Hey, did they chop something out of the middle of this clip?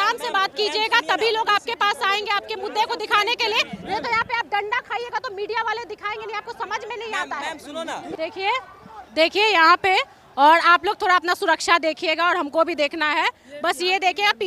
yes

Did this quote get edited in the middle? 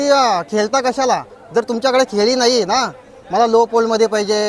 no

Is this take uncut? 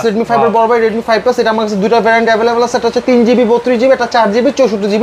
yes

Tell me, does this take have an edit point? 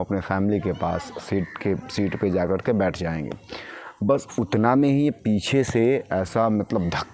no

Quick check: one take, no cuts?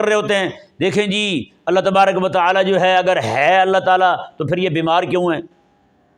yes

